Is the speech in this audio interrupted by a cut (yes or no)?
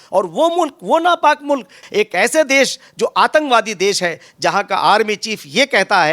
yes